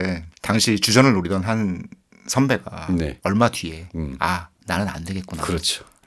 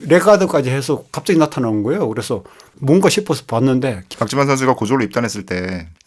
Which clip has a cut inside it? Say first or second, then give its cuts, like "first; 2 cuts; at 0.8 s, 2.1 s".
second; 1 cut; at 4.1 s